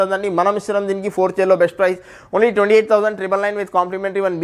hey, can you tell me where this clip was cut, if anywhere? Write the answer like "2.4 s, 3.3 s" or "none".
none